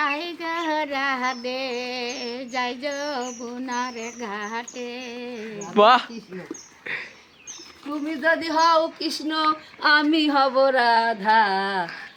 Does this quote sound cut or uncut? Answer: uncut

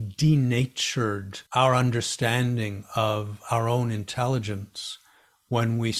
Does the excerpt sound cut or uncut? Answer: cut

